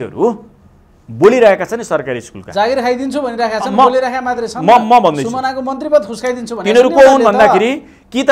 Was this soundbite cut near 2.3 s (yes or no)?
no